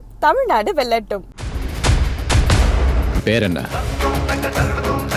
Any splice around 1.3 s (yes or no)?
no